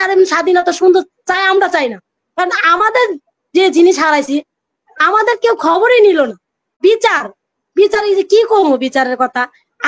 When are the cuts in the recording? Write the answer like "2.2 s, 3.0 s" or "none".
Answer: 6.8 s